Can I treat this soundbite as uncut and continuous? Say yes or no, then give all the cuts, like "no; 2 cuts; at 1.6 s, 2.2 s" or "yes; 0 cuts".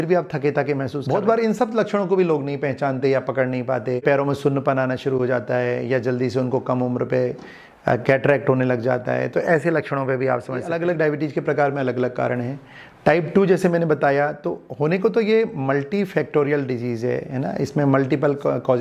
no; 3 cuts; at 1.0 s, 4.0 s, 10.7 s